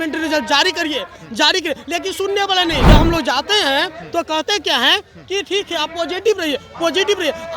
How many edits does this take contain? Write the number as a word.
one